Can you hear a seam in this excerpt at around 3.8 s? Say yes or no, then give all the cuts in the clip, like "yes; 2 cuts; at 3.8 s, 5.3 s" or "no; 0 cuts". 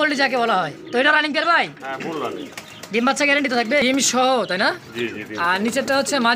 yes; 1 cut; at 3.8 s